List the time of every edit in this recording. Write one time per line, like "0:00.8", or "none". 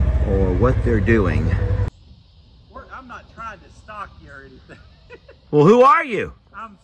0:01.9